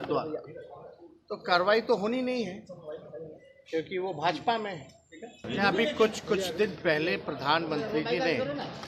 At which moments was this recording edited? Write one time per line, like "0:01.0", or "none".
0:05.4